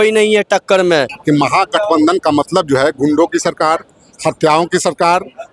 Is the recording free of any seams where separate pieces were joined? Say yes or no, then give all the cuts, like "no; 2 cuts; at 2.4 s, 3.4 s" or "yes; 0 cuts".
no; 1 cut; at 1.1 s